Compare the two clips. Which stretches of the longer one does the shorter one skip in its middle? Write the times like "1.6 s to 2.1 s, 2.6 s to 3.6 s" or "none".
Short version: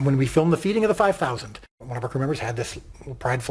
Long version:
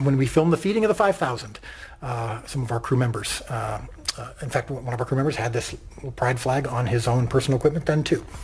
1.8 s to 4.8 s

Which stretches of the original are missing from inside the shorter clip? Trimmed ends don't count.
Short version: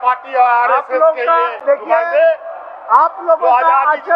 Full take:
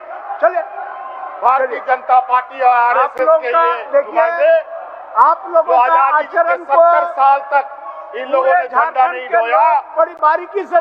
none

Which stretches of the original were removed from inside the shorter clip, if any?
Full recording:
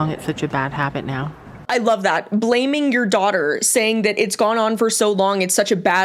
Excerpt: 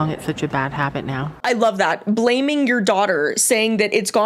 1.3 s to 1.5 s

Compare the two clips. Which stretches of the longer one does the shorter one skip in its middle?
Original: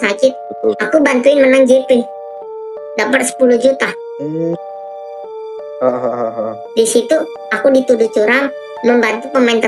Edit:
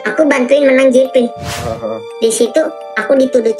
2.4 s to 6.2 s

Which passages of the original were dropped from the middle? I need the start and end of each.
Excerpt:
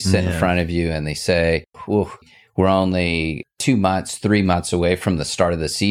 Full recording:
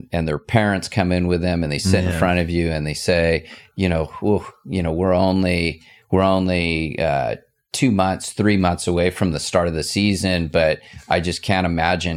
3.8 s to 5.5 s, 6.9 s to 7.5 s

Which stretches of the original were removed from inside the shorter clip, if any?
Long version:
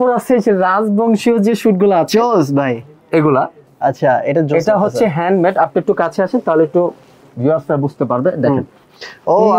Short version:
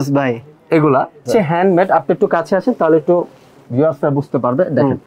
3.7 s to 4.9 s

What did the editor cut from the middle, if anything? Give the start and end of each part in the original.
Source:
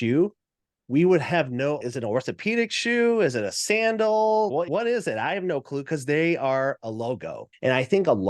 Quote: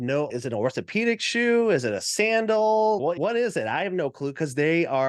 none

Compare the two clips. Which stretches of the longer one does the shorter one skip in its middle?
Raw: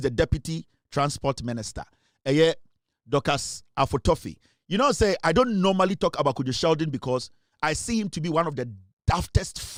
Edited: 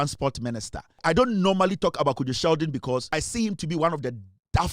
2.0 s to 5.2 s, 7.3 s to 7.6 s

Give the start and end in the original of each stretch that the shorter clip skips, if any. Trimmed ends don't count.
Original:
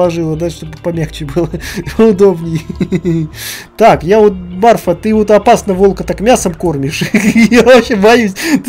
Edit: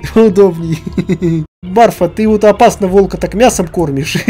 3.4 s to 4.5 s

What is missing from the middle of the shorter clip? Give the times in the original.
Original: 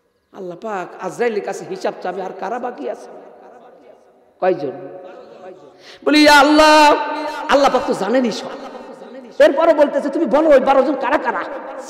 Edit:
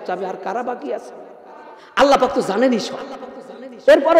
3.8 s to 7.3 s

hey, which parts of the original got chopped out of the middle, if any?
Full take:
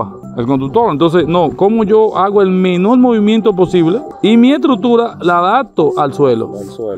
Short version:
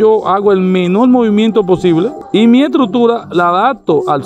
none

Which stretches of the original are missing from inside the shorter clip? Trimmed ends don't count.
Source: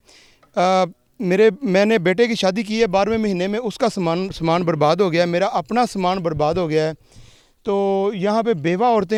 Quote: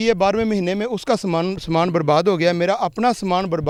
none

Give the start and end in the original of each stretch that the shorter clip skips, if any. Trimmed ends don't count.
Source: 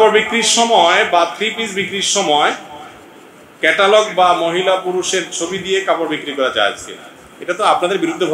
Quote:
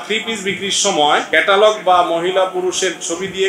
2.6 s to 3.6 s

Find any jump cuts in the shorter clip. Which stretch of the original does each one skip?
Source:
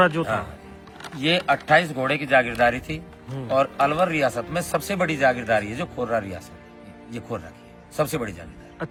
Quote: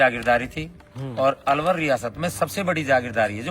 none

